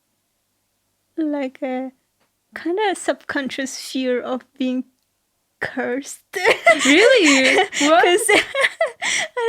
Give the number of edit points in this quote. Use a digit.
0